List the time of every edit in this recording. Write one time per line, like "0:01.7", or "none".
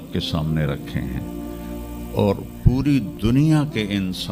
none